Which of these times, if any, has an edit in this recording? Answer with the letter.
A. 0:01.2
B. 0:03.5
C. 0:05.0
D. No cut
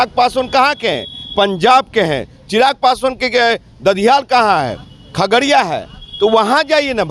D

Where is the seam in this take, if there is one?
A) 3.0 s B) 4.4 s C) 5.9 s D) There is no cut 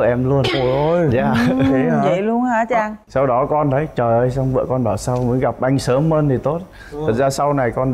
A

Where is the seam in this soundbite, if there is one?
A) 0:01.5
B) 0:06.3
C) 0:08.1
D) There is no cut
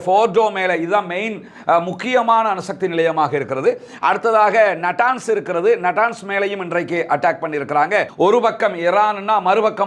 C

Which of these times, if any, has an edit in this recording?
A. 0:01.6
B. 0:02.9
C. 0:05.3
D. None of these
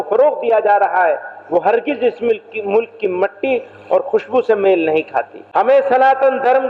C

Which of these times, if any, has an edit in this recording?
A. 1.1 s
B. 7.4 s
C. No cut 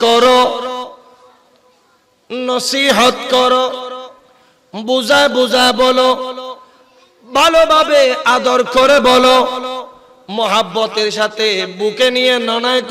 C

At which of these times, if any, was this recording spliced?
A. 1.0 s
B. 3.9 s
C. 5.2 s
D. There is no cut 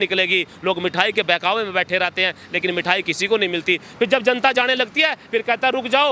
D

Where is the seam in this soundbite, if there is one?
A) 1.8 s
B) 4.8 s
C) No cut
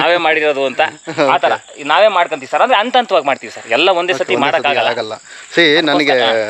C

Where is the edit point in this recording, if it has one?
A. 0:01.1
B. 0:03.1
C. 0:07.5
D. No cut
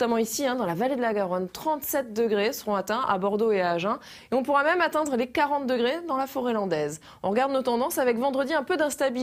C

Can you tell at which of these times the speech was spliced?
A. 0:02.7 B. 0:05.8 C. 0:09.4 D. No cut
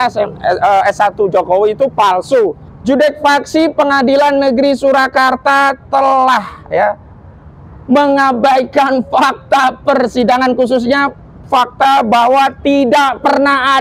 A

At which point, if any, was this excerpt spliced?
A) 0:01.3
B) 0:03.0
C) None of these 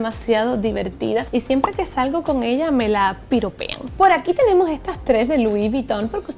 C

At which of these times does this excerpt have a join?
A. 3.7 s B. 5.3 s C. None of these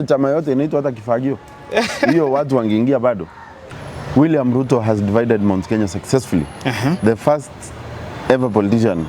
A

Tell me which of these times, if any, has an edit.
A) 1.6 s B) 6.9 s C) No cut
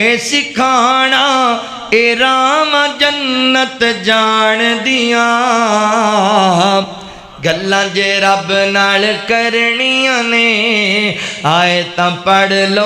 C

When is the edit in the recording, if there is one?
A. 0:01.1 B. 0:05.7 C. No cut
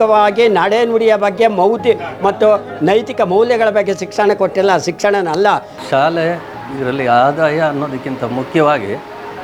B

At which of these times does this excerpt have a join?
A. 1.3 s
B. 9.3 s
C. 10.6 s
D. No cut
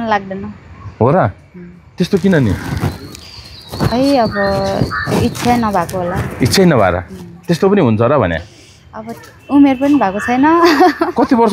D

